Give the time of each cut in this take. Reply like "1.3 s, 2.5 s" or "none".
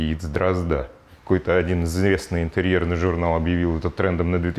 1.1 s